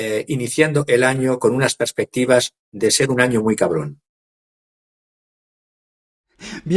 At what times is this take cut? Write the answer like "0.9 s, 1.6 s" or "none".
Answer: none